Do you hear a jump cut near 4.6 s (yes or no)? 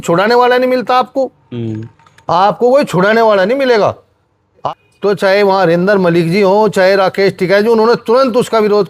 yes